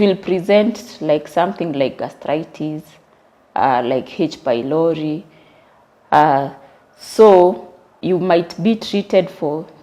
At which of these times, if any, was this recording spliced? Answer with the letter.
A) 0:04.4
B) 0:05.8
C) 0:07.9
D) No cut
C